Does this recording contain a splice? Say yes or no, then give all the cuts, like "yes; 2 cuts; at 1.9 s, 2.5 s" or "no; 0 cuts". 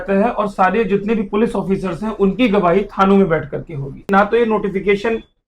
yes; 1 cut; at 4.1 s